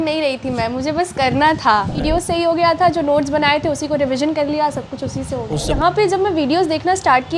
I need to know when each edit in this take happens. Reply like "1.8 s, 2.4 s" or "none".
2.0 s, 5.7 s